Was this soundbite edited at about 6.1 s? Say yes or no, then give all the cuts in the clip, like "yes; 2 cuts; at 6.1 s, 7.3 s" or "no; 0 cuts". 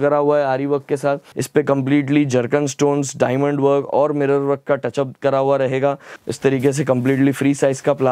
yes; 2 cuts; at 1.3 s, 6.1 s